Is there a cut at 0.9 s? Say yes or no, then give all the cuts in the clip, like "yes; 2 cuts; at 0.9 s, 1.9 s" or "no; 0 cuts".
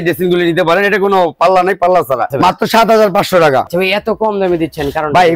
no; 2 cuts; at 2.3 s, 3.7 s